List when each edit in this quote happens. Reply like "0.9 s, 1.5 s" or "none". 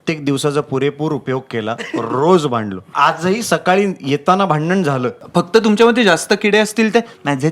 2.9 s, 5.1 s